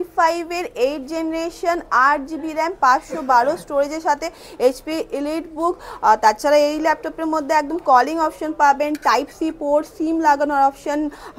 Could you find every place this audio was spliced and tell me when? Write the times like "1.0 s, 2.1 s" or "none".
none